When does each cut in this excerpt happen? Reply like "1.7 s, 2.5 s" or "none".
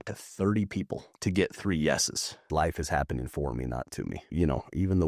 1.0 s, 2.5 s, 4.3 s